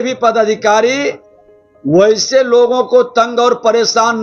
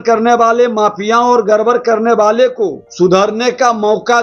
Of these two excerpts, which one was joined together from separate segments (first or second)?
second